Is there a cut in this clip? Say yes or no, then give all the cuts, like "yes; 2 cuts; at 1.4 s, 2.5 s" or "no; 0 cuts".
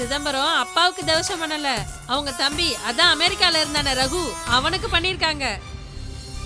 no; 0 cuts